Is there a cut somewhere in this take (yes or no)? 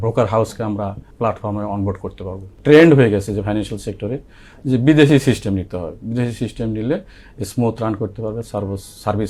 yes